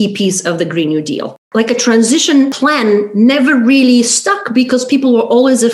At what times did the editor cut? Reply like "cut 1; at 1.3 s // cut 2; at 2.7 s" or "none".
cut 1; at 1.4 s // cut 2; at 2.5 s